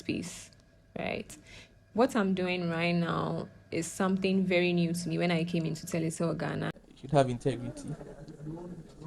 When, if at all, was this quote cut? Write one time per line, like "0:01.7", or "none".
0:06.8